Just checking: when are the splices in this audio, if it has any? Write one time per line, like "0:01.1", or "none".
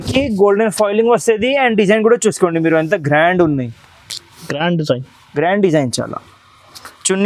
none